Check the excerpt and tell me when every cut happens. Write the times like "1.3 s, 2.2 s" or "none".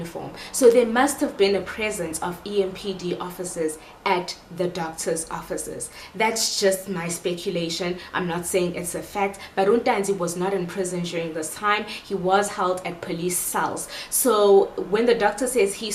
none

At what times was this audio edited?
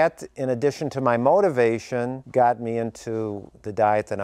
none

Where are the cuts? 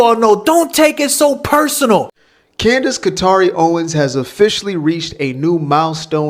2.1 s

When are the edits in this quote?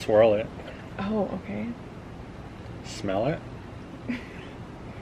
none

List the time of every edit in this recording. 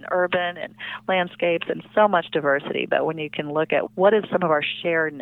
4.2 s

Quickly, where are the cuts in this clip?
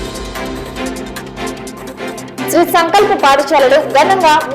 1.4 s, 2.5 s

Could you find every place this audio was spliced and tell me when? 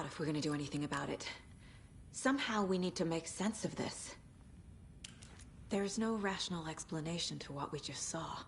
4.2 s, 5.7 s

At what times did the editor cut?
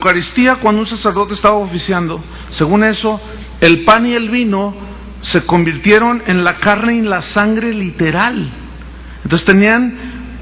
none

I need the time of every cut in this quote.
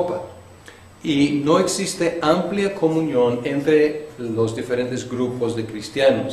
5.0 s

